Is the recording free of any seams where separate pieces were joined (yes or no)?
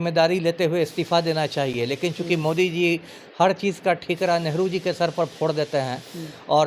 yes